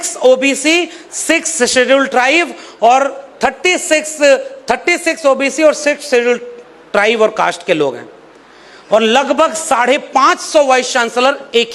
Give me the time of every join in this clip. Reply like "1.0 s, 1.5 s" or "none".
none